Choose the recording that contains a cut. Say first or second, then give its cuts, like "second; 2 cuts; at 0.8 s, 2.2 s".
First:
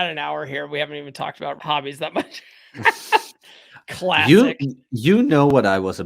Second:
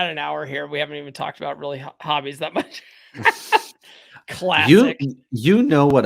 first; 1 cut; at 1.6 s